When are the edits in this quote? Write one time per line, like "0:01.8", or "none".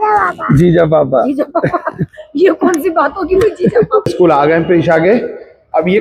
0:04.1